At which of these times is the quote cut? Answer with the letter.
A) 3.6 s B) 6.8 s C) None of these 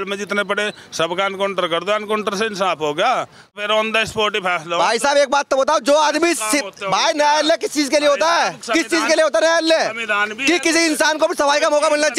A